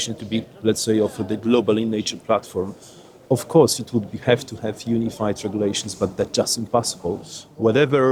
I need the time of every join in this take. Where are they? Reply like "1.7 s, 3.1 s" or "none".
none